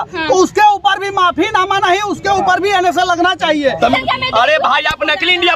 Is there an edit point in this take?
yes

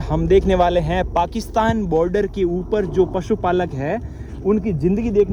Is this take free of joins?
yes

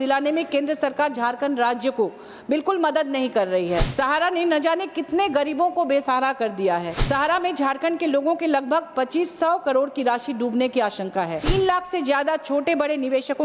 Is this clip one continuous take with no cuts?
no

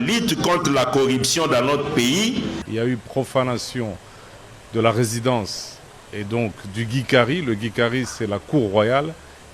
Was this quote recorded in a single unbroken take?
no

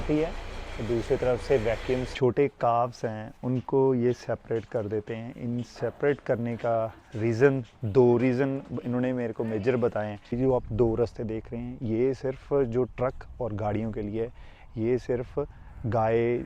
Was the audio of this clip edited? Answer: yes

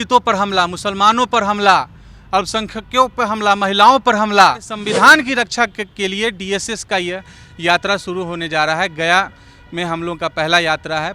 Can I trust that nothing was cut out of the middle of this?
no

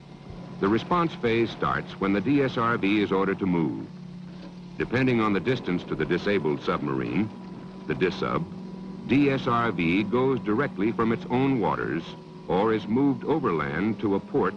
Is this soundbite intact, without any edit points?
yes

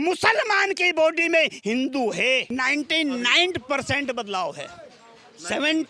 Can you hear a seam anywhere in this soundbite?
yes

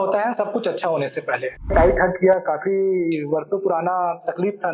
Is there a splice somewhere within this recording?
yes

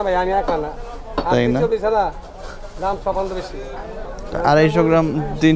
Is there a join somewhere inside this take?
no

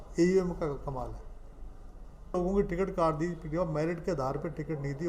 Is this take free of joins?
no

